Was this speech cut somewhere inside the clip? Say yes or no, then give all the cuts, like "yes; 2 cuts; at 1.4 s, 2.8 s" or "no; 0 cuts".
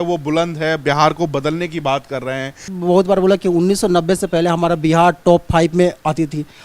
yes; 1 cut; at 2.7 s